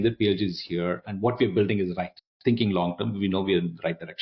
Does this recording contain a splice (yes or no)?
no